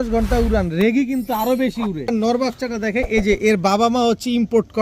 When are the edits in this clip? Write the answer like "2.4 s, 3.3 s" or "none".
2.1 s